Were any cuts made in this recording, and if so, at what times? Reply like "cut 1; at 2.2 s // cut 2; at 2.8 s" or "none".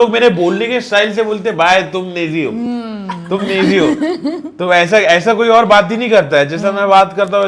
none